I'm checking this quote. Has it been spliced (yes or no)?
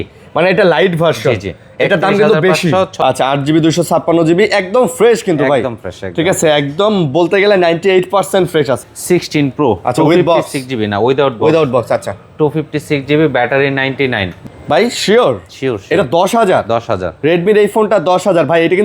yes